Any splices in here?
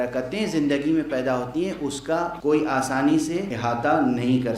yes; 2 cuts; at 2.3 s, 3.5 s

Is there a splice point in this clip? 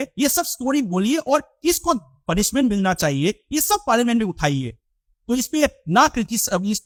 no; 0 cuts

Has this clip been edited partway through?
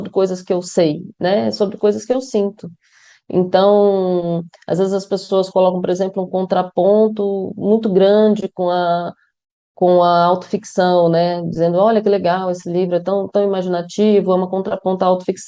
no; 0 cuts

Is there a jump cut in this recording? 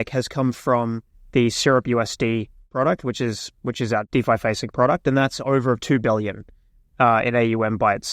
yes; 2 cuts; at 2.7 s, 4.1 s

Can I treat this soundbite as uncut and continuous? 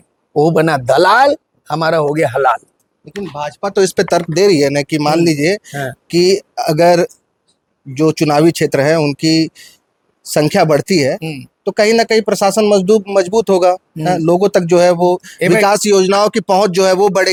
yes; 0 cuts

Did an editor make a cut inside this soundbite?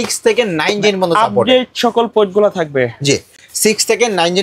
no; 0 cuts

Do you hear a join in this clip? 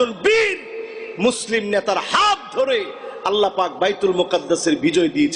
no; 0 cuts

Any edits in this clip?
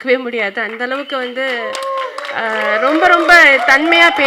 no; 0 cuts

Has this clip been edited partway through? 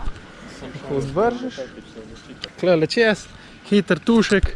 yes; 1 cut; at 2.4 s

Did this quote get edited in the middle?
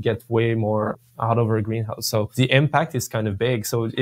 yes; 1 cut; at 2.3 s

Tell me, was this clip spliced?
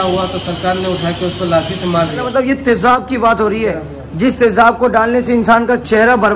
yes; 1 cut; at 2.3 s

